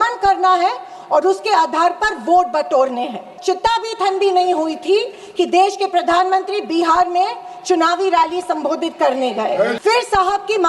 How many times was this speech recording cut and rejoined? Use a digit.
2